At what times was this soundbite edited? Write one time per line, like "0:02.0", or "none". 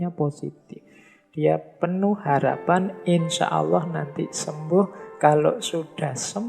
none